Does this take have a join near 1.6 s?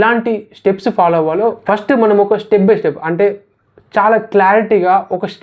yes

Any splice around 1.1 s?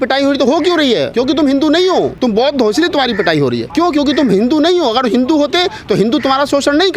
yes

